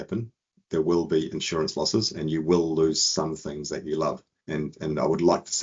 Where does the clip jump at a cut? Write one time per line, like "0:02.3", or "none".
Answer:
0:04.3